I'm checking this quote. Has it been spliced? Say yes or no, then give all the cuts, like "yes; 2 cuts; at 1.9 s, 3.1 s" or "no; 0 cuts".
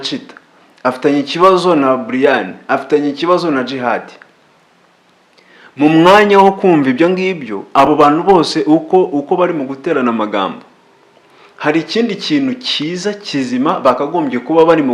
no; 0 cuts